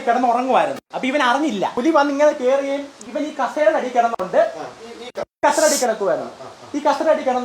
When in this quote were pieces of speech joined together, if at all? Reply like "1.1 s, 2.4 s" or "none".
1.7 s, 3.0 s